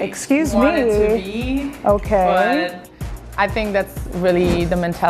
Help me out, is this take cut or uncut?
uncut